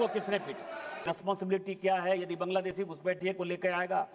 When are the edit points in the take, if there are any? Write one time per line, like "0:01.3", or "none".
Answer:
0:01.1